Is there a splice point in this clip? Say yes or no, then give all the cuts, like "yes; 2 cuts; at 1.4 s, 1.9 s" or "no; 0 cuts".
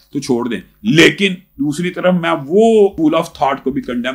yes; 1 cut; at 2.9 s